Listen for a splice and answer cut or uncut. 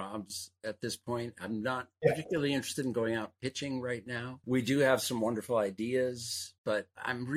cut